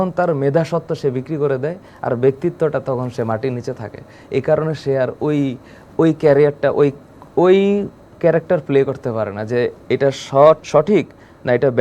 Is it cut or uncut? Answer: uncut